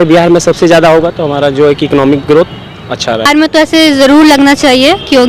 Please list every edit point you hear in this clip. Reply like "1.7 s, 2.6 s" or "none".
3.3 s